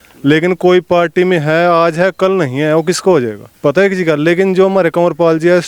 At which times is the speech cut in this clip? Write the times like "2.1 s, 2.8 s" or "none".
3.4 s